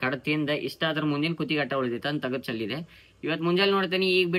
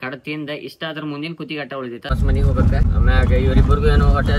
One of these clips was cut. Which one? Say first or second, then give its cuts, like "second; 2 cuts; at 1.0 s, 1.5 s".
second; 2 cuts; at 2.1 s, 2.8 s